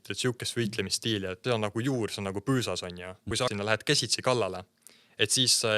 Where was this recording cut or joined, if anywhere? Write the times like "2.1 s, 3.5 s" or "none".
1.4 s, 3.5 s